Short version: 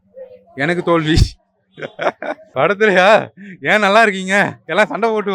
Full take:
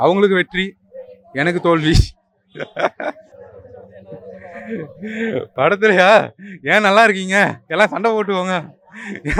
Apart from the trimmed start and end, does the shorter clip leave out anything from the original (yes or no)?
yes